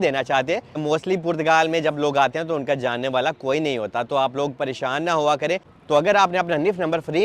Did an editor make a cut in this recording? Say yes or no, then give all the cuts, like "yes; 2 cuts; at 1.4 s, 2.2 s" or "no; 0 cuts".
yes; 2 cuts; at 0.8 s, 5.7 s